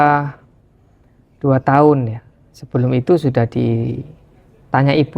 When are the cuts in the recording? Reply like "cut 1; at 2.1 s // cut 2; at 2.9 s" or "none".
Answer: none